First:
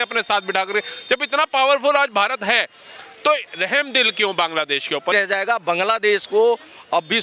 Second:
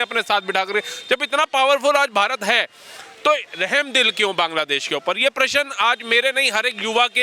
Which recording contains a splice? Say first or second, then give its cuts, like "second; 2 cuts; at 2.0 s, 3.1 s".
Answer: first; 1 cut; at 5.1 s